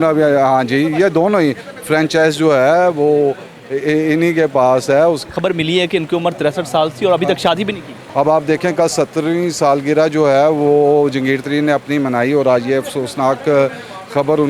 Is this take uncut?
no; 2 cuts; at 5.2 s, 8.0 s

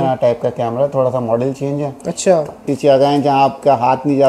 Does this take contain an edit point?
yes; 1 cut; at 2.7 s

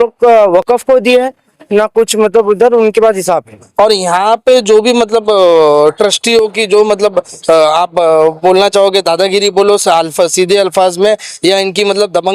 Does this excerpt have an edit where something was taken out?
yes; 1 cut; at 3.6 s

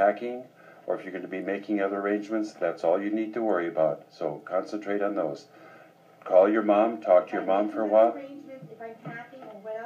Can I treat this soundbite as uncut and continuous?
yes; 0 cuts

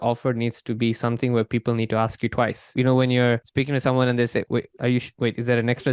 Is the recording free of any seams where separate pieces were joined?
no; 3 cuts; at 2.7 s, 3.5 s, 5.1 s

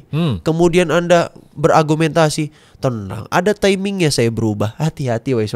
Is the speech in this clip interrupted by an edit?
no; 0 cuts

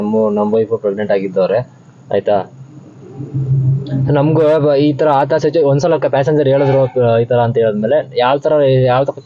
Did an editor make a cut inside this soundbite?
no; 0 cuts

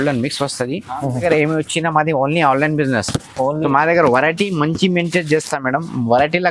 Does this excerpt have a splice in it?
yes; 1 cut; at 1.2 s

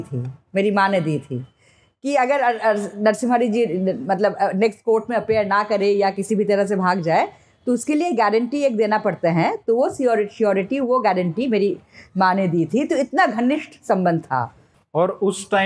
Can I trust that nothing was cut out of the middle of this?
yes; 0 cuts

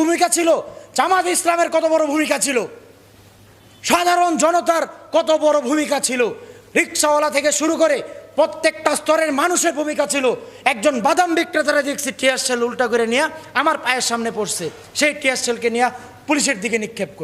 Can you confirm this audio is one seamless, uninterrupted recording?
yes; 0 cuts

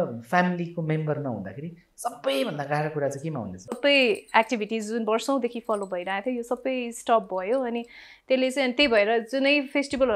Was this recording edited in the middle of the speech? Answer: yes; 1 cut; at 3.7 s

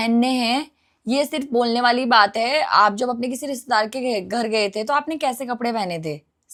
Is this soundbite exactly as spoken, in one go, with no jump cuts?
yes; 0 cuts

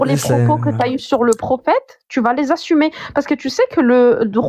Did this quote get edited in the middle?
no; 0 cuts

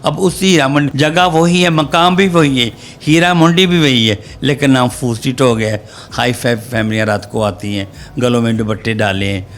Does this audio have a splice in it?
yes; 1 cut; at 0.9 s

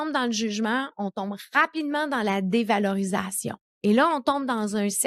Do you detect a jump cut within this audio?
no; 0 cuts

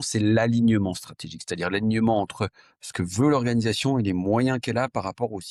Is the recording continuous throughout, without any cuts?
yes; 0 cuts

